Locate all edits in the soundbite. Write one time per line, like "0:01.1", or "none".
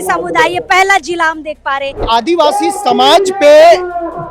0:02.0